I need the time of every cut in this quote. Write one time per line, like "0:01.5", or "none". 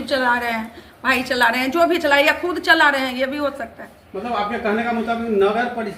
none